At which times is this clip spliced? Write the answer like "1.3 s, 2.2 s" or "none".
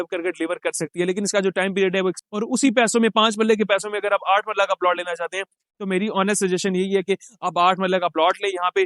2.2 s